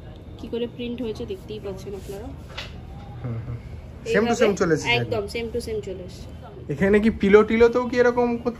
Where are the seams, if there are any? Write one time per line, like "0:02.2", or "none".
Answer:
0:06.6